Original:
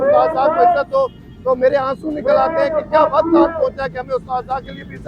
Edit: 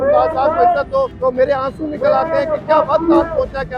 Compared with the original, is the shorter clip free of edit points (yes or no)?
no